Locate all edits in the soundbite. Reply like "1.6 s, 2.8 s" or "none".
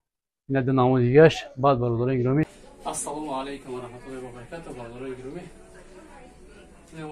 2.6 s